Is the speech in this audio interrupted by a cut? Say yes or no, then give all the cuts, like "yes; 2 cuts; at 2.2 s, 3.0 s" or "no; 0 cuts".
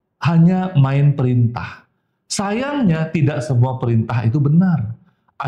no; 0 cuts